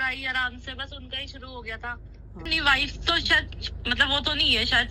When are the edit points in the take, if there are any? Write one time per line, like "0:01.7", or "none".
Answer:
0:02.4